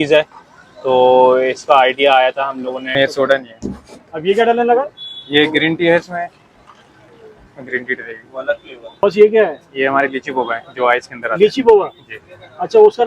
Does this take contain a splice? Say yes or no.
yes